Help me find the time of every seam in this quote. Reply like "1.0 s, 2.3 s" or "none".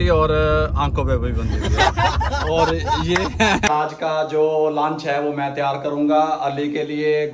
3.7 s